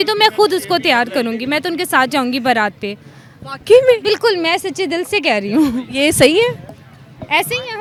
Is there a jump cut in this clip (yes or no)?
no